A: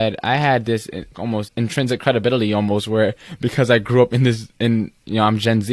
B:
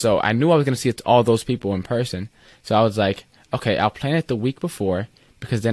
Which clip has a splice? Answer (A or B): A